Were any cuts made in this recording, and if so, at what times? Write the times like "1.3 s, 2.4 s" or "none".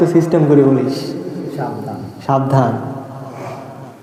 none